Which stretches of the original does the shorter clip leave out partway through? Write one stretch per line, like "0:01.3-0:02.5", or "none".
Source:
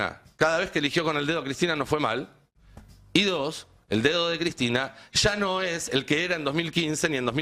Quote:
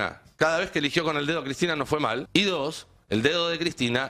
0:02.2-0:03.0